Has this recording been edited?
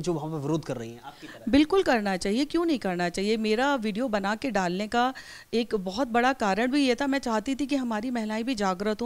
no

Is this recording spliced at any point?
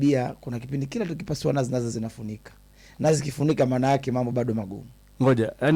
no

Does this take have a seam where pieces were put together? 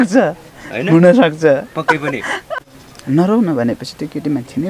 yes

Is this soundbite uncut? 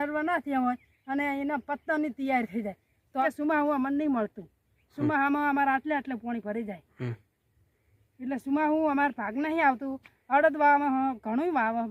no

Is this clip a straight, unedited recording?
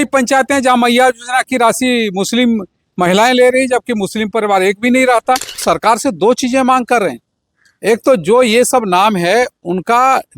no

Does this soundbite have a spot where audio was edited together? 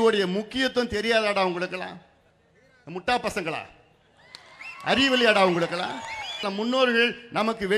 yes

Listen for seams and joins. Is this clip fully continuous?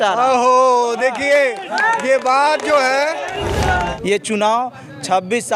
no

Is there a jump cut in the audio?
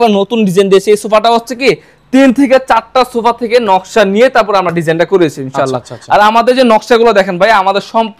no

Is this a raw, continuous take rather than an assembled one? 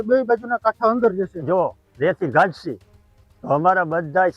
no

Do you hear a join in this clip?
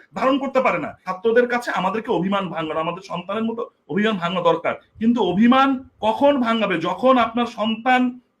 yes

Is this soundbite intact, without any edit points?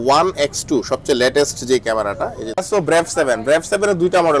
no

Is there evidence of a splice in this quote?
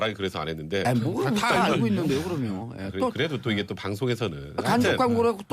yes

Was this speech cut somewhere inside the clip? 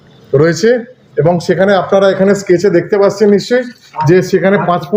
no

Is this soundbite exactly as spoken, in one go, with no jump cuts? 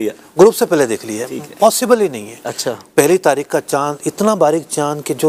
yes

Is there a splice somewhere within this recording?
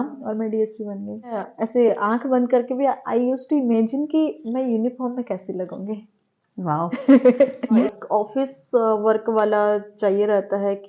yes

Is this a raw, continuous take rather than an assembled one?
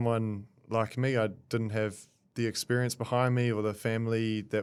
yes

